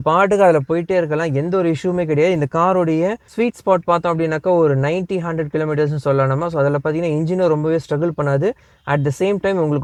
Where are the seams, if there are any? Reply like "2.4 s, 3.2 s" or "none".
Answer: none